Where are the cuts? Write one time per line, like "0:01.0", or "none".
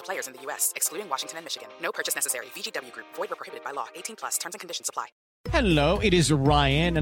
0:05.2